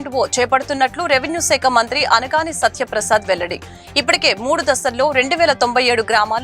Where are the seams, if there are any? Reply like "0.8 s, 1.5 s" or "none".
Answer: none

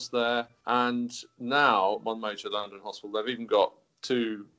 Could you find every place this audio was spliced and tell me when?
2.0 s

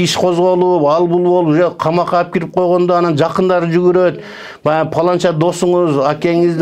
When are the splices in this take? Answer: none

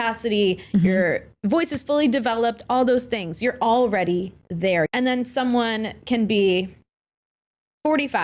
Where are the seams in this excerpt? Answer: 4.9 s

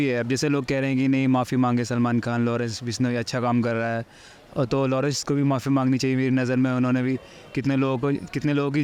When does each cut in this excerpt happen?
none

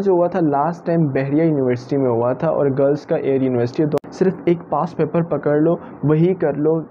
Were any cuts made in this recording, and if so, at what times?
4.0 s

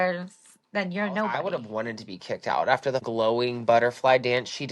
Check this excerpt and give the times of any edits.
1.4 s, 3.0 s

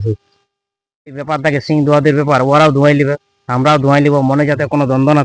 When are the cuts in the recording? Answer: 1.2 s

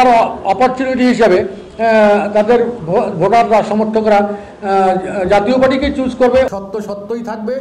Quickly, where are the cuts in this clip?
6.5 s

